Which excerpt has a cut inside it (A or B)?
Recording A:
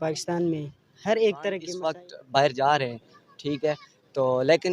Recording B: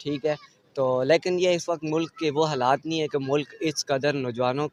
A